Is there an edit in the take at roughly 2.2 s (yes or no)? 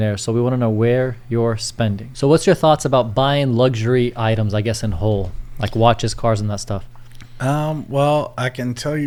no